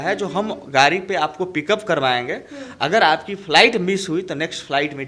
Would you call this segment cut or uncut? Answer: uncut